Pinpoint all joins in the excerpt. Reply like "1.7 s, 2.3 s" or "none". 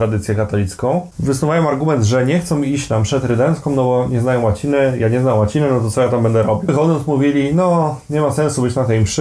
1.1 s, 6.7 s